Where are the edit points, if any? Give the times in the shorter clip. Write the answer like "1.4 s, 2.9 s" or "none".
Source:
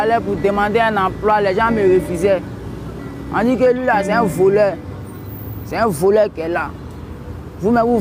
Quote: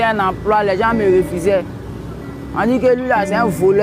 none